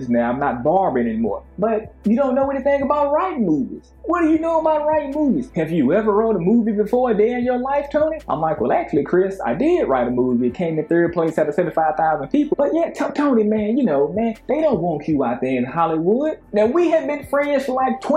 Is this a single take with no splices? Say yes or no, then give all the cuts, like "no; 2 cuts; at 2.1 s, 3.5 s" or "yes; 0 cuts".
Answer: yes; 0 cuts